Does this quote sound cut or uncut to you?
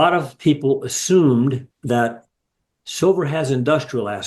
cut